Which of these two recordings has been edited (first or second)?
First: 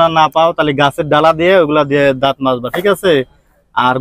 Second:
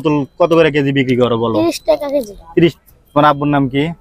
second